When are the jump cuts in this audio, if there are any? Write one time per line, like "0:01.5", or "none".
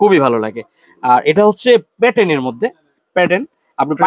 none

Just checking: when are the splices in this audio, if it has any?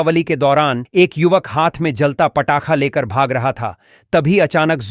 none

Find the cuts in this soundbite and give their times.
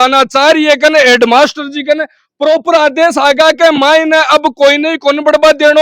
none

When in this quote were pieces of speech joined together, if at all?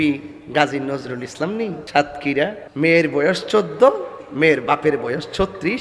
0:01.8
0:02.6

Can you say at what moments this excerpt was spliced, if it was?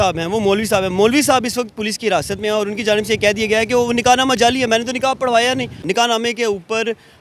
0:05.8

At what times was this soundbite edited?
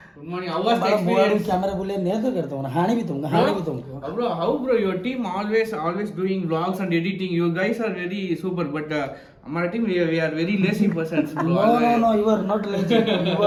none

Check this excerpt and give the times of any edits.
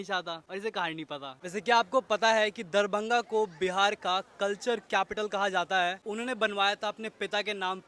0:01.3
0:06.0

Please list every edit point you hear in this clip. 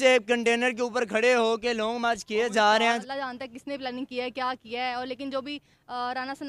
0:03.0

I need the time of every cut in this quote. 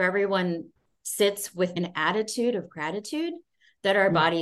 0:01.8

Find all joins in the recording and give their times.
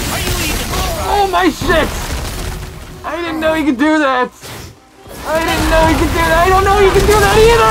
0:01.0

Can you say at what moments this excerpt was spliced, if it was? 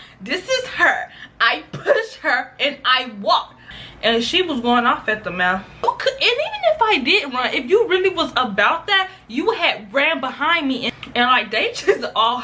0:03.7
0:05.8
0:10.9

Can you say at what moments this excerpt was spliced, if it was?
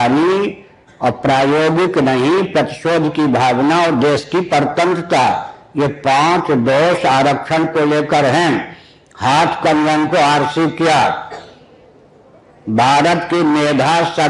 none

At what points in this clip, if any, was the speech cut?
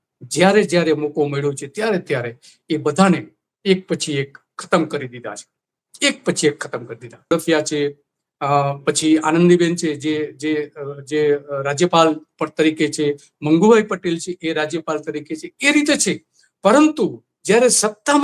0:07.3

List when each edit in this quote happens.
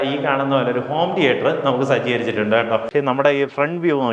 0:02.9

